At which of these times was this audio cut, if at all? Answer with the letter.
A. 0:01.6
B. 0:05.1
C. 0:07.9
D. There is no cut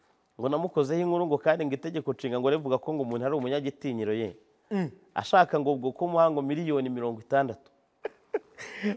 C